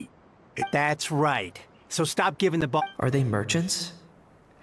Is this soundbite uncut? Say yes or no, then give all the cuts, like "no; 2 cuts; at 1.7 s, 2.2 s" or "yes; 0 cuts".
no; 2 cuts; at 0.7 s, 2.8 s